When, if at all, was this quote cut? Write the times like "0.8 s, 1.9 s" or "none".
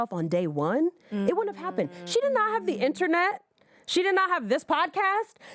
none